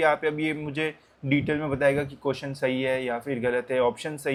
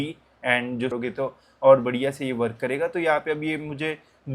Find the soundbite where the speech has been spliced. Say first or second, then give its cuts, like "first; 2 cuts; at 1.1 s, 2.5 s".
second; 1 cut; at 0.9 s